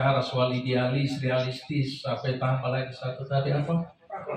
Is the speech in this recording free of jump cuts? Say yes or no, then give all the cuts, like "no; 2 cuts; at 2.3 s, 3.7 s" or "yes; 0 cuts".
yes; 0 cuts